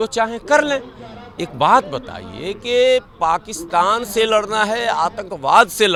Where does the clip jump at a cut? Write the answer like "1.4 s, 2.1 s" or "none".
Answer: none